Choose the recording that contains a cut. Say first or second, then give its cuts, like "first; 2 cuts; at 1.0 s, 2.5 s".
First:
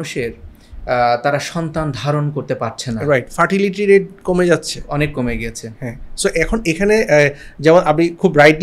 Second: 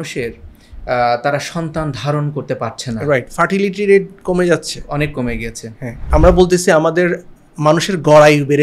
second; 1 cut; at 6.1 s